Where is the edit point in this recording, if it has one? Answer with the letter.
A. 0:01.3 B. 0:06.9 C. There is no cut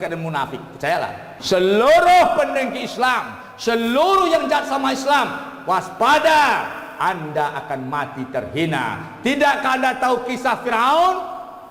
A